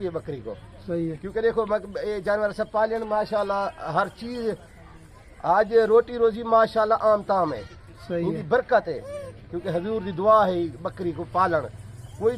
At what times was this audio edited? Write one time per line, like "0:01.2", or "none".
none